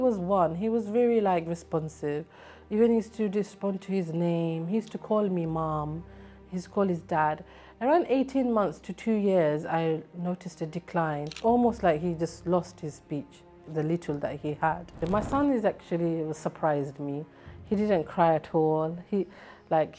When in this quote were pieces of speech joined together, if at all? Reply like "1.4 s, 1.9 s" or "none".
11.3 s, 15.0 s